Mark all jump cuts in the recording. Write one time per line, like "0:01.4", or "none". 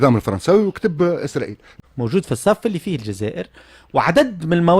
0:01.7

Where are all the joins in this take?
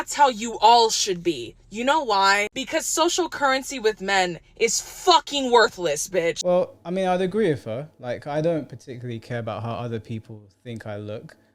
none

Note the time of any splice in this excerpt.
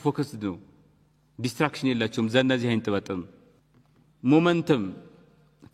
none

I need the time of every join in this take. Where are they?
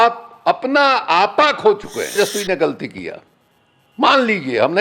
0:02.2

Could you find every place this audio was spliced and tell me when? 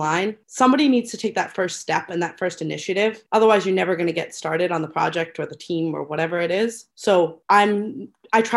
none

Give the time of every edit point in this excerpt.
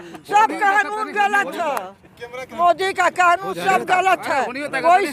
none

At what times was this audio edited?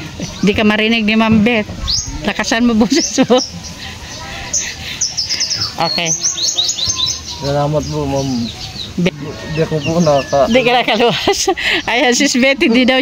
0:09.1

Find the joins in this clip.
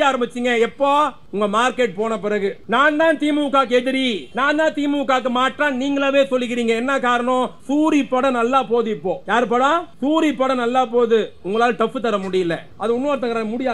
0:01.2
0:02.6
0:04.3
0:07.6
0:09.2
0:09.9
0:12.7

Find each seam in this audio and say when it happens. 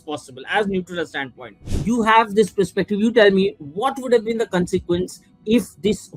0:01.8

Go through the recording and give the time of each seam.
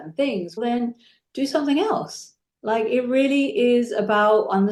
none

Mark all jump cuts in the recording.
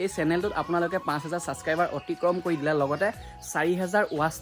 none

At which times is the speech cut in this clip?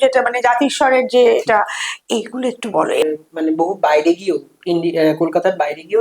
0:03.0

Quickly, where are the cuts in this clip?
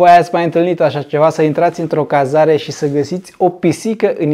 none

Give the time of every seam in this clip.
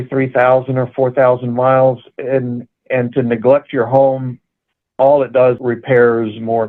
0:05.6

